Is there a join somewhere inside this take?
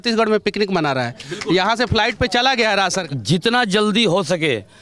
yes; 1 cut; at 3.0 s

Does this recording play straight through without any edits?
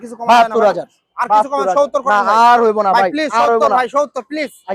yes; 0 cuts

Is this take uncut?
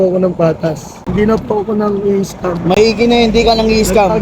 no; 1 cut; at 1.0 s

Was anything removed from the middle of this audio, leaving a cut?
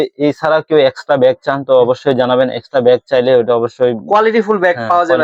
no; 0 cuts

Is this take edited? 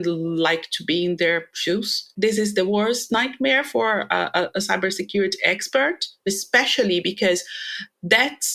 yes; 2 cuts; at 2.1 s, 6.2 s

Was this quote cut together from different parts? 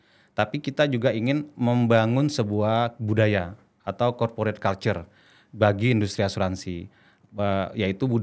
no; 0 cuts

